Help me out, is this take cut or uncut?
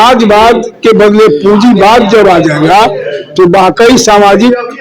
cut